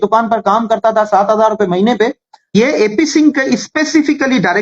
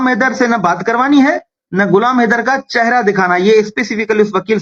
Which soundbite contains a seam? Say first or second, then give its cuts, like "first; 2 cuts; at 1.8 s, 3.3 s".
first; 1 cut; at 2.5 s